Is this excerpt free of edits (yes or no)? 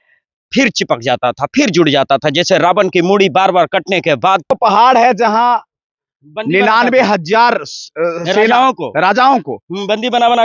no